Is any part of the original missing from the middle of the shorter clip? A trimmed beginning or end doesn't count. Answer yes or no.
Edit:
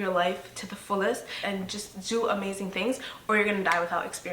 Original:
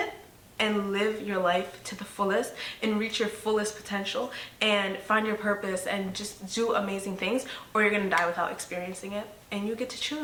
yes